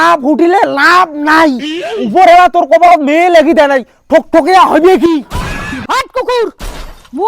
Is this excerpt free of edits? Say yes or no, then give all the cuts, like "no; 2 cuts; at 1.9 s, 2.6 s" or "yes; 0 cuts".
no; 1 cut; at 5.8 s